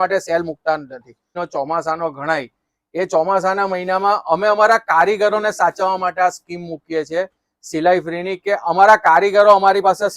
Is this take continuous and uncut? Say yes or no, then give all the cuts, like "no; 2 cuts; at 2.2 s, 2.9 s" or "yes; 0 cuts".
no; 1 cut; at 1.3 s